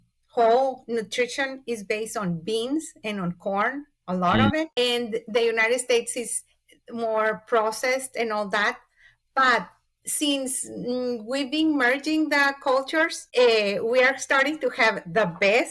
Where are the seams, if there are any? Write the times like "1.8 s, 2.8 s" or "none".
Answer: 4.7 s, 13.2 s